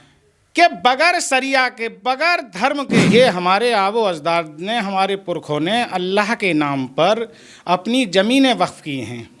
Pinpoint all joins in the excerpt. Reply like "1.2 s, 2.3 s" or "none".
3.0 s

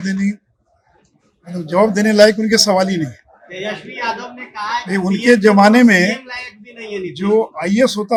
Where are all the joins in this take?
none

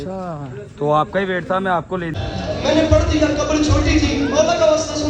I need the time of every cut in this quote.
2.2 s

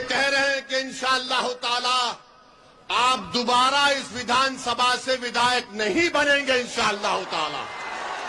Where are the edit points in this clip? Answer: none

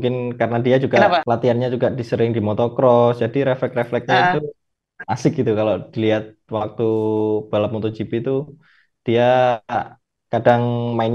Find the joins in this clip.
1.2 s

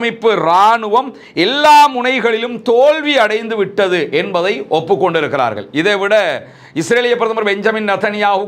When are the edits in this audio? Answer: none

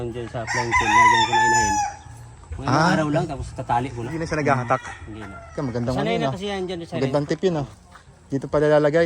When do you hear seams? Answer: 4.2 s

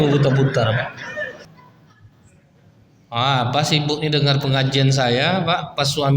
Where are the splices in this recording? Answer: 1.5 s

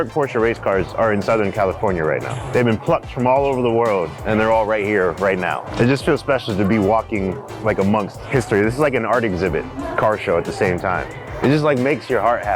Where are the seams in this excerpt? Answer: 2.4 s, 4.2 s, 5.6 s, 8.2 s, 9.8 s, 11.2 s

